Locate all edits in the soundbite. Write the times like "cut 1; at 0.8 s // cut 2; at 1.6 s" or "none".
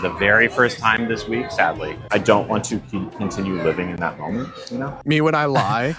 cut 1; at 1.9 s // cut 2; at 5.0 s